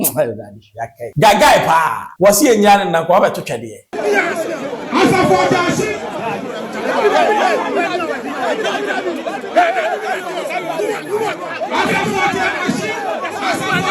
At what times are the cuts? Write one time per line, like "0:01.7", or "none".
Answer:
0:01.0
0:02.0
0:03.9